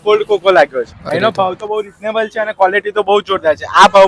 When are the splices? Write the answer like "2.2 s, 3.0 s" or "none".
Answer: 1.0 s